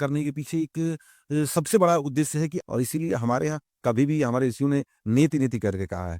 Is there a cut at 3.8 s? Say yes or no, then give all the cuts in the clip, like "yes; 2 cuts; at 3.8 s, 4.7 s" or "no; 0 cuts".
no; 1 cut; at 2.6 s